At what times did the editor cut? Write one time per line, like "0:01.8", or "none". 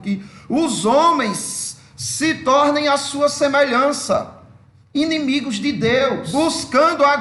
0:06.2